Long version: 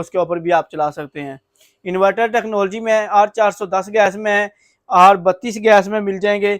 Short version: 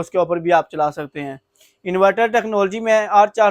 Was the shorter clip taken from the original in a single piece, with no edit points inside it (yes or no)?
yes